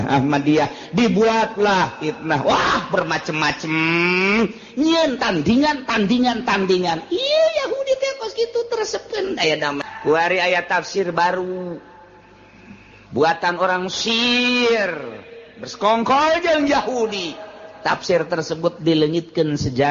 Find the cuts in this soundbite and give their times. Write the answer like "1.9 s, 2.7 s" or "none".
9.9 s

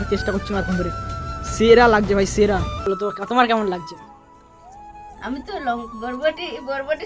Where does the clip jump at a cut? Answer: 2.8 s

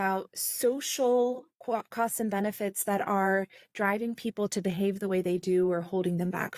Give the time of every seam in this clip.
none

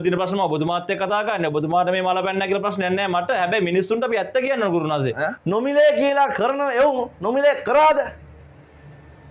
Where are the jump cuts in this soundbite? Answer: 5.3 s

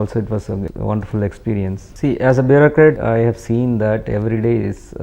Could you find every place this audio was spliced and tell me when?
1.9 s

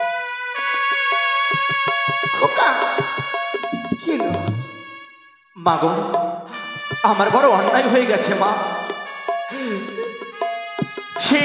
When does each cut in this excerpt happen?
none

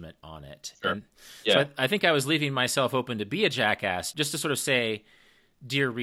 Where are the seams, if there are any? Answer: 4.1 s

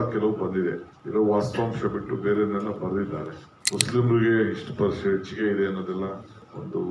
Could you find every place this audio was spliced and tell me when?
0.9 s

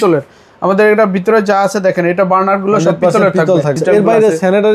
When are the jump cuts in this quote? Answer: 3.8 s

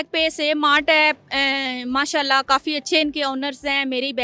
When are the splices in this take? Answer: none

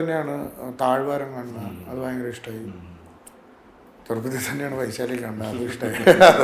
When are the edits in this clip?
none

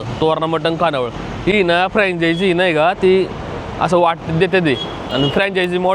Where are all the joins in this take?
none

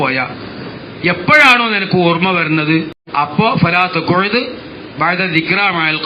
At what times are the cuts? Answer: 3.3 s

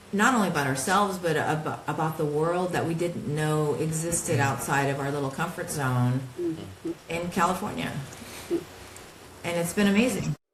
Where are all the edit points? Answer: none

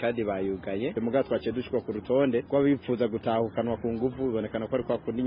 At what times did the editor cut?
0.9 s

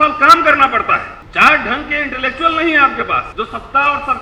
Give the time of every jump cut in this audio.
1.2 s, 3.3 s

